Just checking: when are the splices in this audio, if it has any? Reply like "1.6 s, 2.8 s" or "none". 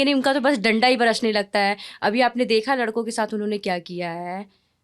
none